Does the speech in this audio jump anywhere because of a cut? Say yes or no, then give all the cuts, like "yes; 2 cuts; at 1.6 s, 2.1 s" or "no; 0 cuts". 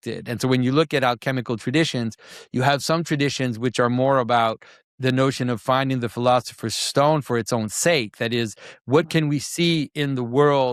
no; 0 cuts